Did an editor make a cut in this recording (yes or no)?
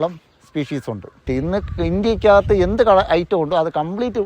yes